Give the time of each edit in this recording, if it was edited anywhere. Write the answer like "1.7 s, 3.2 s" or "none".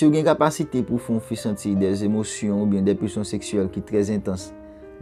none